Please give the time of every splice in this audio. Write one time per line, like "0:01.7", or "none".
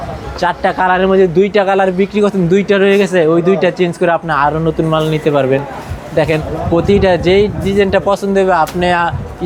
none